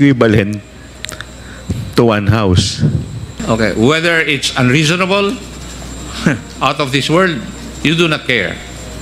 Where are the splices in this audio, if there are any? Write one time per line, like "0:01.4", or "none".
0:03.4